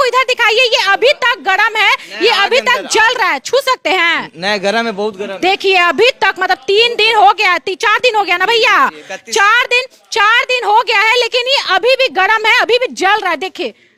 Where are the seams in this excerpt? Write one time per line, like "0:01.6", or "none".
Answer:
none